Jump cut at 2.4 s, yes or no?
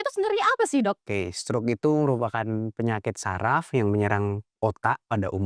no